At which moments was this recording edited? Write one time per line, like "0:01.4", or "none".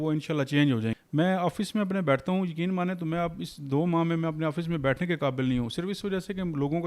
0:01.0